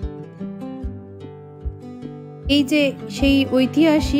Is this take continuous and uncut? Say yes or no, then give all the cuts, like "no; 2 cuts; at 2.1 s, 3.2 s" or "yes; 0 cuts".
no; 1 cut; at 2.5 s